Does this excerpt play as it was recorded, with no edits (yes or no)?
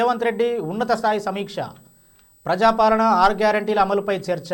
yes